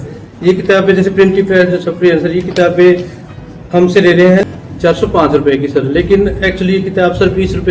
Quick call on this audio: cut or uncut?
cut